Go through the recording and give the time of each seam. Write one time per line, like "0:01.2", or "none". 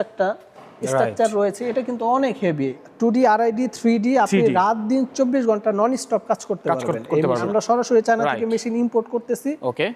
0:02.8
0:07.5